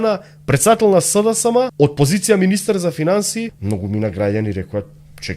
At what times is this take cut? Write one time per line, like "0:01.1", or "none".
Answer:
0:01.7
0:03.6